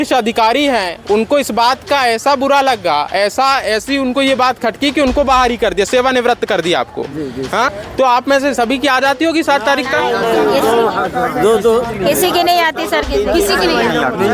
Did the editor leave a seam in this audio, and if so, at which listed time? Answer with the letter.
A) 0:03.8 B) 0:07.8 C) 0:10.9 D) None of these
B